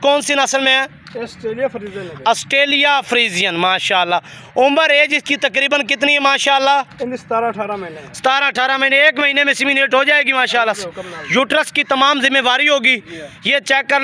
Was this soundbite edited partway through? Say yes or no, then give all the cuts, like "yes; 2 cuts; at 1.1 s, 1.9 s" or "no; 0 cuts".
no; 0 cuts